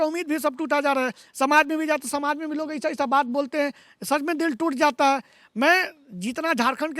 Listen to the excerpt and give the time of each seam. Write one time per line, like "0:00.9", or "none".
none